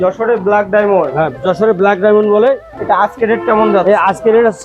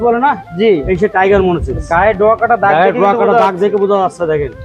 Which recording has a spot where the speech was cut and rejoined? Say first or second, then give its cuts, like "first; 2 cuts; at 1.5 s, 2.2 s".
first; 1 cut; at 2.7 s